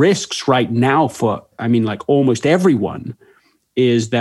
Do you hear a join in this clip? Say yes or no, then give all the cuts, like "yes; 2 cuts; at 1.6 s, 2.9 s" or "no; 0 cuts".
yes; 1 cut; at 1.5 s